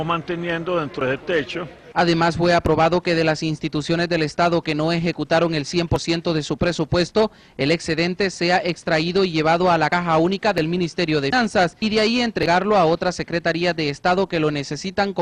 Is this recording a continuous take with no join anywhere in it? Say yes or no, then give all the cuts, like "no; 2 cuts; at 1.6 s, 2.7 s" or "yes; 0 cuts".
yes; 0 cuts